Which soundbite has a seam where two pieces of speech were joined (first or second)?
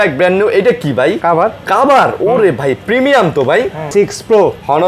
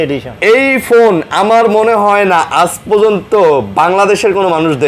first